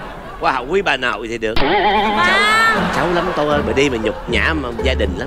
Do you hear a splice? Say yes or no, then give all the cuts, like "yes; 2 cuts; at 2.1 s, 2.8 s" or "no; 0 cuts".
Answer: no; 0 cuts